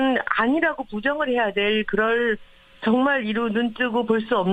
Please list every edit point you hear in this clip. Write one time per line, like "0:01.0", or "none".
0:03.2